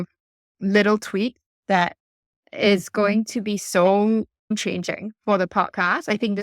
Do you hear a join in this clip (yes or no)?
yes